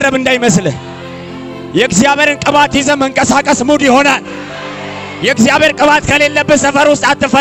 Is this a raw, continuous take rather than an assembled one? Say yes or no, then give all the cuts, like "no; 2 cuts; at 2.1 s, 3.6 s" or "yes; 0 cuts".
yes; 0 cuts